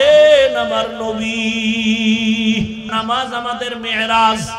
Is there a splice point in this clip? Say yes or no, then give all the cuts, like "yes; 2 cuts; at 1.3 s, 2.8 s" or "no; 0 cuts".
yes; 1 cut; at 2.9 s